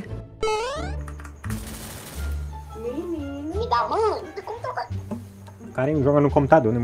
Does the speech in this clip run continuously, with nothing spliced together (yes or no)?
no